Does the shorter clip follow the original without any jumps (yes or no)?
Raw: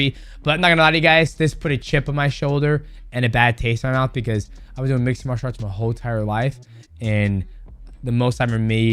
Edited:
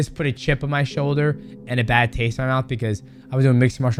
yes